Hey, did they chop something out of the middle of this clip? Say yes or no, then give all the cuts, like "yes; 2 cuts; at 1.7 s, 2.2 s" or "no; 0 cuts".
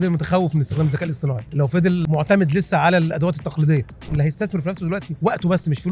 yes; 3 cuts; at 1.9 s, 4.1 s, 5.1 s